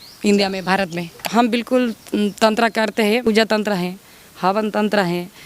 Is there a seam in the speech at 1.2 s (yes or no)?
yes